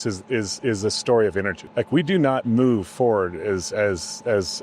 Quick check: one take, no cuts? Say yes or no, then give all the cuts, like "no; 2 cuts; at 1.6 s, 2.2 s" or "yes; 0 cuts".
no; 1 cut; at 1.6 s